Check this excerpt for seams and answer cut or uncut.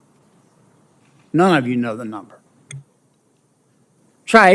cut